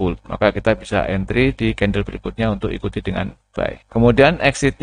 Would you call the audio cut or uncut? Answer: cut